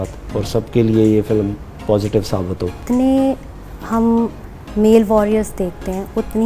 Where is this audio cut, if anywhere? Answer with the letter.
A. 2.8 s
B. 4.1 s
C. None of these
A